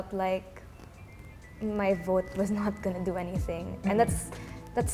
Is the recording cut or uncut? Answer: uncut